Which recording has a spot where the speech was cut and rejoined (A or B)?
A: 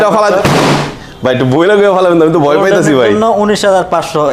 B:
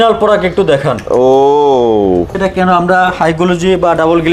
B